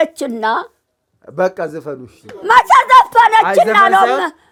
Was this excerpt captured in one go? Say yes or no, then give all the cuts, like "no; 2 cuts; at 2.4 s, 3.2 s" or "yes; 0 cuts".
yes; 0 cuts